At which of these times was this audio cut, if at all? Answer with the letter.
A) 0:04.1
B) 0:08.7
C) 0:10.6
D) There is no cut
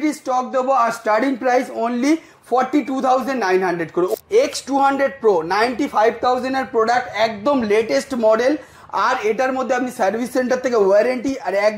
A